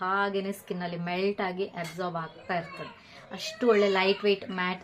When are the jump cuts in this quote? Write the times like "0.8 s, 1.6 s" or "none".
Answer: none

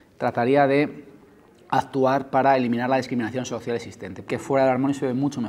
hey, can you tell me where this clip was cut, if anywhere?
4.2 s

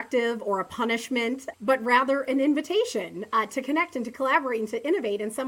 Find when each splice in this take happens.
1.5 s

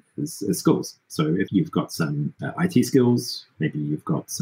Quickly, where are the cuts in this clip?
1.5 s, 2.4 s

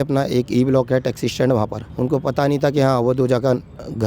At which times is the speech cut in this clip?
1.8 s

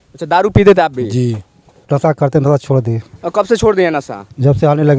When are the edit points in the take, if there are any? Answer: 1.8 s

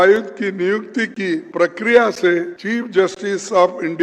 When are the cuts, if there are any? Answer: 1.5 s, 2.6 s

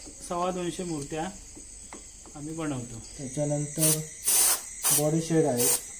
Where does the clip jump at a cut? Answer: 3.1 s

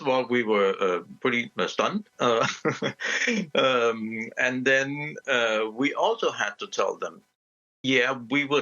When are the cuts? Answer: none

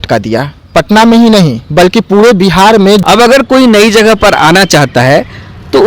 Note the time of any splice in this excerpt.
3.0 s

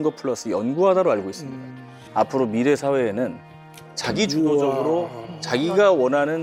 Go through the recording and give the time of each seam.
none

